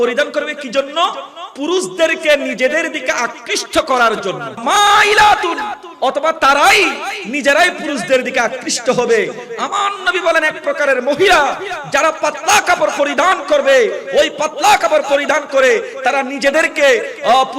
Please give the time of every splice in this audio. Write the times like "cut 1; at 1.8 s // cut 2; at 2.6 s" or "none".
cut 1; at 4.6 s

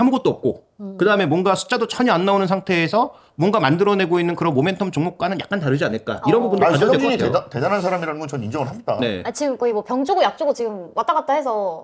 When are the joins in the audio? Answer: none

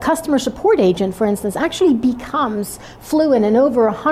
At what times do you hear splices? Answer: none

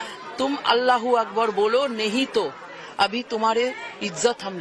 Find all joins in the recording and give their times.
none

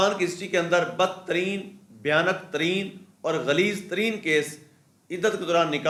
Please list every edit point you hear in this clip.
none

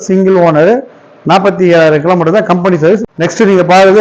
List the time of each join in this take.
cut 1; at 3.0 s

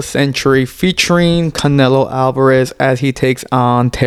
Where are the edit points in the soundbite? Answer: none

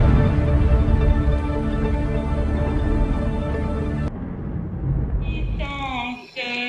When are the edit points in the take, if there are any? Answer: cut 1; at 5.6 s

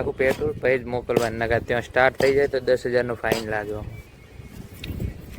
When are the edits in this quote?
none

